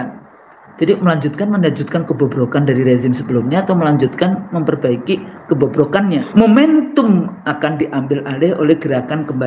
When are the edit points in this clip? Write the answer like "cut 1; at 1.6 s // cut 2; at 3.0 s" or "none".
cut 1; at 6.3 s